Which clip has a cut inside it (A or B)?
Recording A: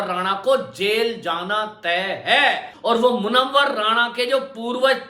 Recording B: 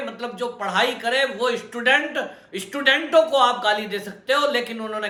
A